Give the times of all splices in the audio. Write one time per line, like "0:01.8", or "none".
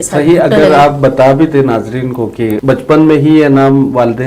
none

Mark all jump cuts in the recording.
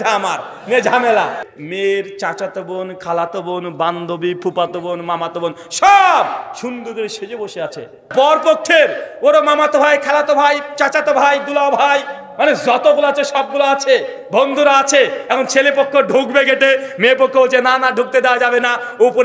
0:01.4
0:08.1

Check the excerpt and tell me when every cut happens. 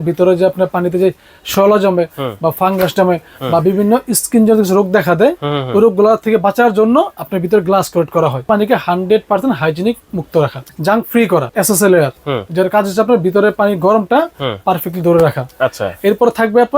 0:08.5
0:10.6
0:11.5

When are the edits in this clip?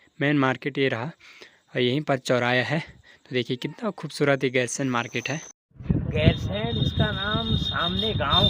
0:05.8

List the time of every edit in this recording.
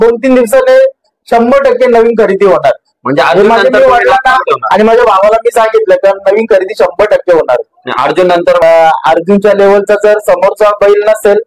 0:08.6

